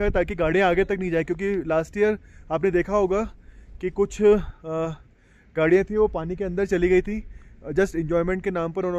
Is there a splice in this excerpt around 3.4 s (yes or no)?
no